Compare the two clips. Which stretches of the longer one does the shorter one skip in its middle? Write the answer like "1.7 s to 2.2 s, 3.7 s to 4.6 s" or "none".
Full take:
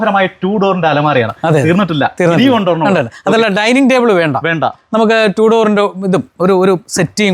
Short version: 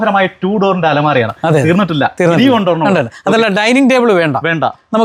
none